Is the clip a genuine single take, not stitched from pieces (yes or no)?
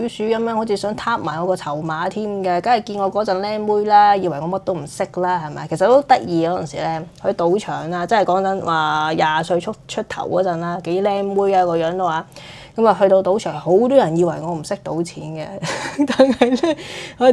yes